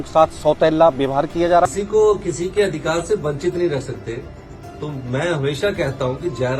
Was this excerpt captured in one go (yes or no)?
no